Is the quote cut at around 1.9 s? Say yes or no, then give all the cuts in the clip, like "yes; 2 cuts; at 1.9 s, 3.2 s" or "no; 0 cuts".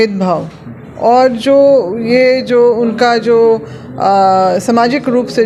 no; 0 cuts